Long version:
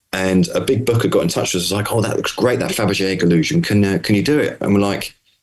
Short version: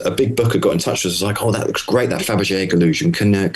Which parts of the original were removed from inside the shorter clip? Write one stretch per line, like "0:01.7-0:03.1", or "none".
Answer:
none